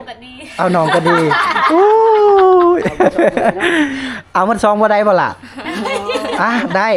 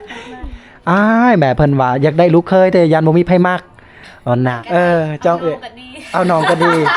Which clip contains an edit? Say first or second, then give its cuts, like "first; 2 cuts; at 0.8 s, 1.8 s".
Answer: second; 1 cut; at 4.6 s